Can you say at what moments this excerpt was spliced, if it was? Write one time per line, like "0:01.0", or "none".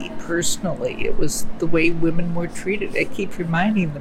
none